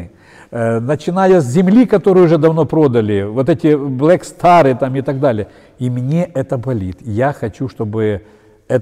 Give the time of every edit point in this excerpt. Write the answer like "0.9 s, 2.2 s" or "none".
none